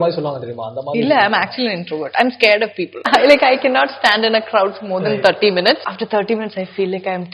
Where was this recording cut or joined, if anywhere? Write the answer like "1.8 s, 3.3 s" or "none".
3.0 s, 5.9 s